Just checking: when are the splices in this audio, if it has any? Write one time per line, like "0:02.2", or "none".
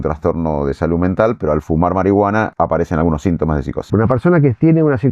0:02.5
0:03.8